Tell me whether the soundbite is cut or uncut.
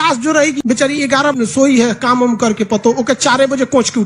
cut